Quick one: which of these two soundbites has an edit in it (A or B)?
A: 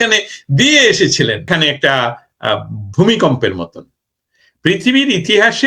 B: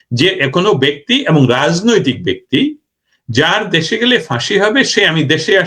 A